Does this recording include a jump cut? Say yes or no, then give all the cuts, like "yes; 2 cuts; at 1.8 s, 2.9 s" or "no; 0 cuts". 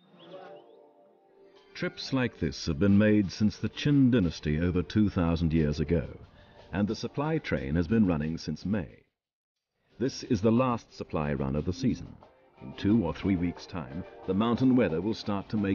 yes; 1 cut; at 5.0 s